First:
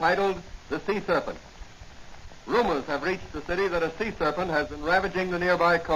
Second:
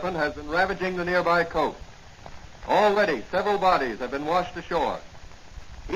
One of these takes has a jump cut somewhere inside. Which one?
first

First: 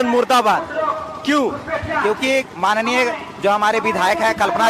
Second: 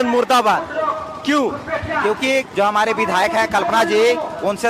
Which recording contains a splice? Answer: second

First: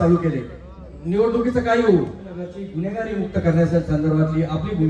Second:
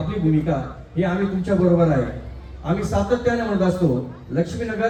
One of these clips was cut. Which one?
first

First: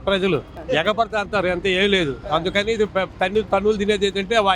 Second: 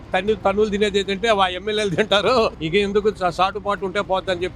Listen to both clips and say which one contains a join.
second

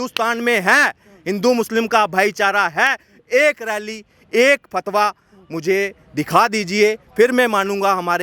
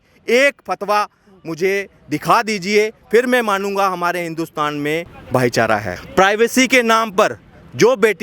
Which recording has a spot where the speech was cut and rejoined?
second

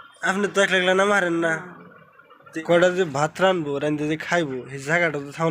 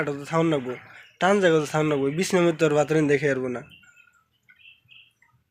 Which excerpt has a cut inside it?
first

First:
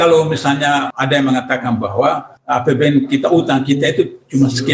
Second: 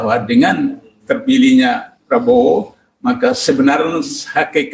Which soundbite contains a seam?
first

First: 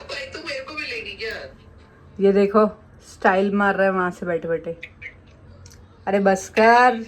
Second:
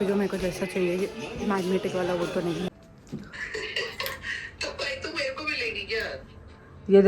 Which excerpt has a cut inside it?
second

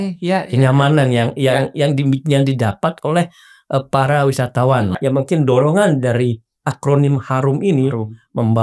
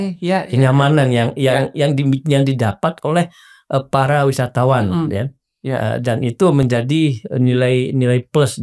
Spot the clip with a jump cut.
first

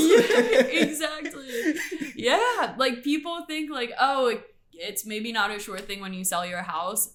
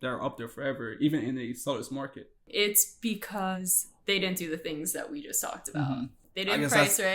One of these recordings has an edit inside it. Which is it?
second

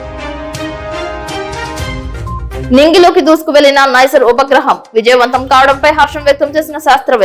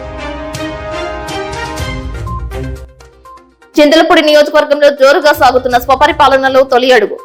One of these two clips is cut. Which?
first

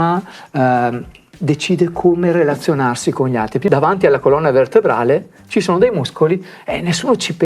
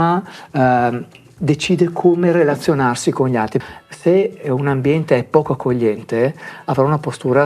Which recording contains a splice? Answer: first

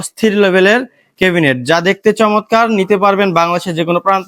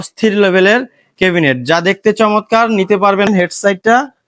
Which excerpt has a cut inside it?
second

